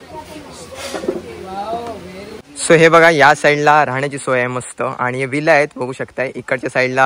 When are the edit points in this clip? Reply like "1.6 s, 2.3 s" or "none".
2.7 s